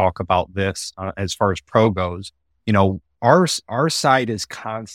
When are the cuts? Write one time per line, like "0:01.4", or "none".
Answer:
none